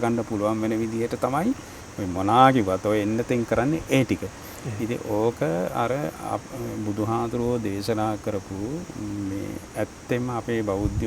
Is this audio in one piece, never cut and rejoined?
yes; 0 cuts

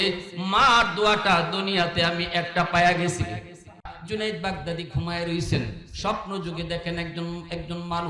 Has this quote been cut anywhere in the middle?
yes; 1 cut; at 3.9 s

